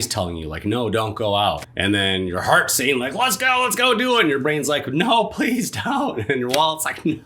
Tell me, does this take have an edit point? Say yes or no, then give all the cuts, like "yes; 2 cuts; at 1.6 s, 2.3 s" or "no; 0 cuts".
yes; 1 cut; at 1.7 s